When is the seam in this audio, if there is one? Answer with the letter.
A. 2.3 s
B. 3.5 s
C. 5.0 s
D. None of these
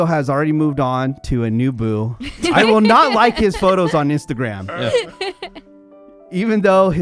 D